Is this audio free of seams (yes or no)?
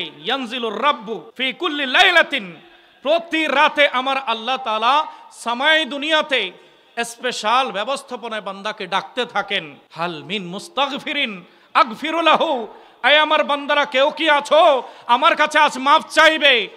no